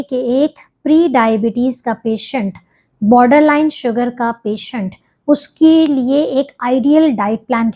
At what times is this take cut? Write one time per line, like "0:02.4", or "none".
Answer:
none